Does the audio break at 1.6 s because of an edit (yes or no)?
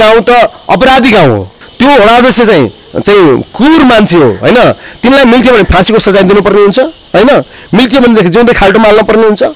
yes